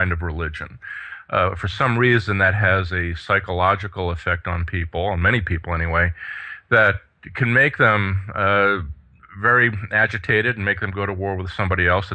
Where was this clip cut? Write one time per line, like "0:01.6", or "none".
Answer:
none